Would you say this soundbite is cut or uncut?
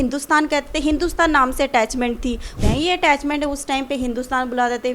cut